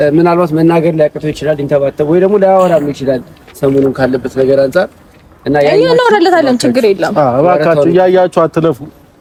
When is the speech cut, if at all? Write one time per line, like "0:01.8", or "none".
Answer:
none